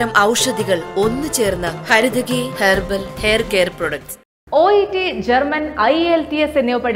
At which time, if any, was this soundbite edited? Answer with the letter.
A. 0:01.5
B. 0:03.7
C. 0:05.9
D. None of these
D